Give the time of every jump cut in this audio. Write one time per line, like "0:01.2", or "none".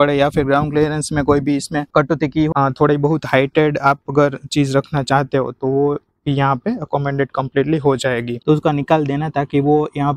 0:02.5
0:08.4